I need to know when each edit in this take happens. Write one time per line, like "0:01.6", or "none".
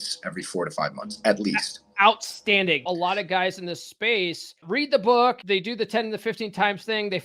0:02.9
0:04.6
0:05.4